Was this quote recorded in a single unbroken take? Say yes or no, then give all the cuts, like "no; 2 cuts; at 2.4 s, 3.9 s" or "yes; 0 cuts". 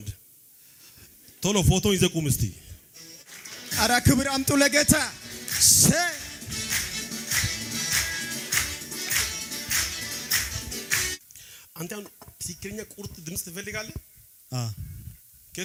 yes; 0 cuts